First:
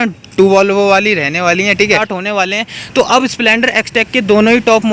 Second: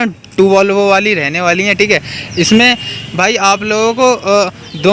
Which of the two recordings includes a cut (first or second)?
first